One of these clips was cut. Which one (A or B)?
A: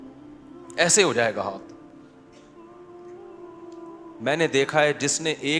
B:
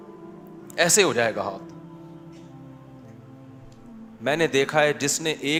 A